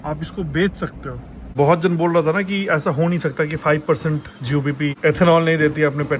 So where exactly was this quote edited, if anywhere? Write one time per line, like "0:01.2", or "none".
0:01.5
0:05.0